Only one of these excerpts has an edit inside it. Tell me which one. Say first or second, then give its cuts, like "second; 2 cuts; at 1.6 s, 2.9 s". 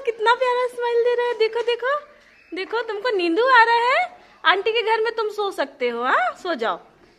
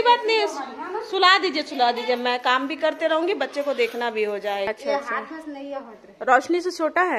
second; 1 cut; at 4.7 s